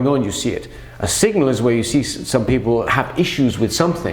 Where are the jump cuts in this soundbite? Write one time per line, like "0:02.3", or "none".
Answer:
0:02.9